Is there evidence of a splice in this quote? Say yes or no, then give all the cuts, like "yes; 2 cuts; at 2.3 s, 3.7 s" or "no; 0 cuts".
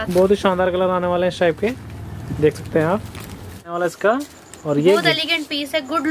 yes; 1 cut; at 3.7 s